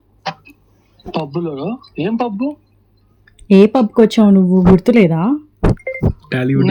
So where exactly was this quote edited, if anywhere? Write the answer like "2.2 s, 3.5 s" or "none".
none